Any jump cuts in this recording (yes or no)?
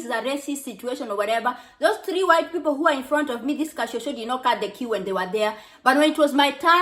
no